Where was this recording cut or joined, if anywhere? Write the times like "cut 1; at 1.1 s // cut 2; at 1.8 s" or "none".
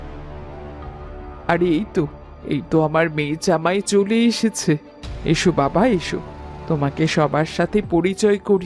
cut 1; at 1.4 s